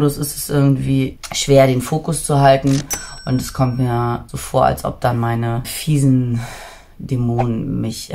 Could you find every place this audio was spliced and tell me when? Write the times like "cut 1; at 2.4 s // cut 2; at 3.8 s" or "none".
cut 1; at 1.2 s // cut 2; at 4.3 s // cut 3; at 5.7 s